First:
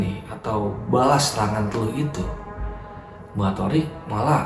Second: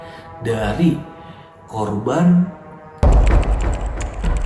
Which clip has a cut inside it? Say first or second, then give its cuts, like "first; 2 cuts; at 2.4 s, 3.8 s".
second; 1 cut; at 3.0 s